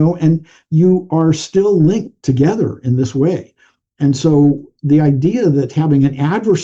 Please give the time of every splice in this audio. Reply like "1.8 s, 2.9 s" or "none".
none

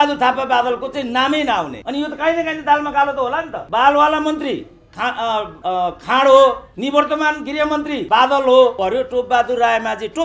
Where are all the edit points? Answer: 1.8 s, 3.6 s, 5.5 s, 6.7 s, 8.0 s, 8.8 s

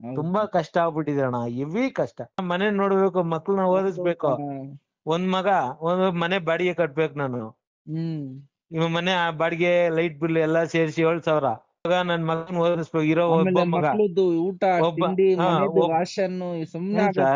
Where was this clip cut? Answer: 2.4 s, 11.9 s

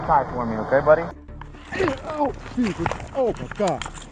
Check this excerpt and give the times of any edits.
1.2 s

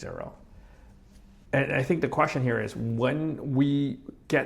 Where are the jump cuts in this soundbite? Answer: 1.3 s

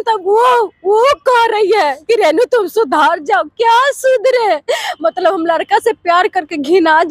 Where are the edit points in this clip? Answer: none

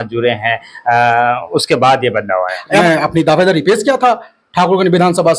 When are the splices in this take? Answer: 2.7 s

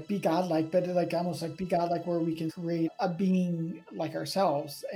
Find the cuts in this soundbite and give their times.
2.5 s

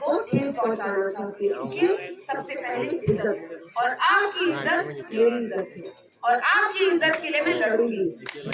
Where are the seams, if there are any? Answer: none

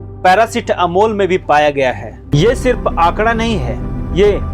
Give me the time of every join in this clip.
2.2 s

